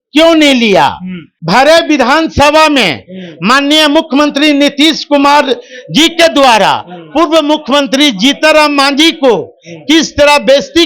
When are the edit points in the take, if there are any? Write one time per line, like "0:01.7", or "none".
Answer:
0:01.3